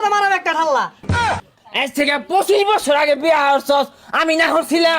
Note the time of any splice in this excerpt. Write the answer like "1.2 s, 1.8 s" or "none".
1.4 s